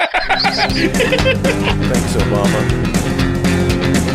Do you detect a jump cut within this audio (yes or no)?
yes